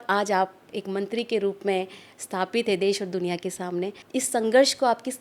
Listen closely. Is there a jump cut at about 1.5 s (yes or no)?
no